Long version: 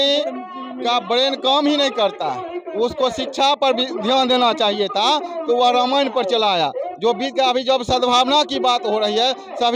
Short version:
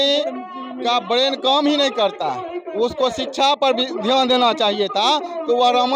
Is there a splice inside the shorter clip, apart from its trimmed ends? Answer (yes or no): no